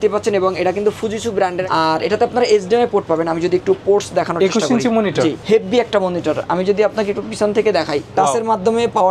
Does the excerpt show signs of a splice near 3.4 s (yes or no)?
no